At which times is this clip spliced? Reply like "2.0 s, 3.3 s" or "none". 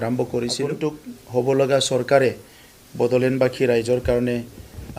1.1 s